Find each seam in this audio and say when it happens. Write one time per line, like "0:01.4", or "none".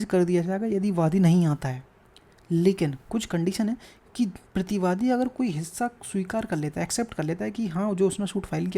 none